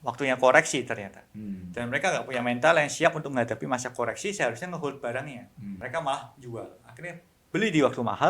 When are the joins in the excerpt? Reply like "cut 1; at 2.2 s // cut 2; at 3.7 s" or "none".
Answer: cut 1; at 5.8 s